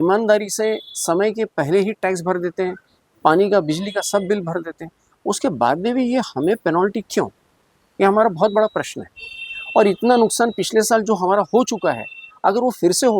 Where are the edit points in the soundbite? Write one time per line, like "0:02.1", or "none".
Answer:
none